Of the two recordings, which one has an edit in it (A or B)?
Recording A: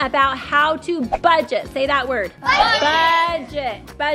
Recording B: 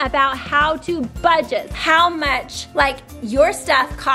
B